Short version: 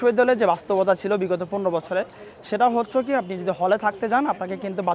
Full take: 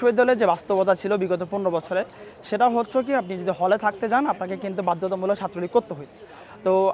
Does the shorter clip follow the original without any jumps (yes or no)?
yes